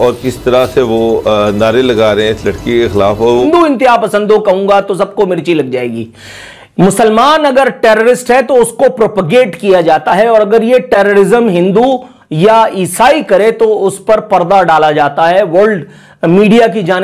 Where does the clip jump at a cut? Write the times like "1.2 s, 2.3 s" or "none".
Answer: 3.4 s